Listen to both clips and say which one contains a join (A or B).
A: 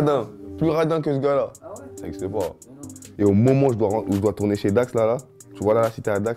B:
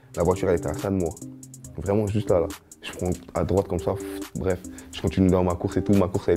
A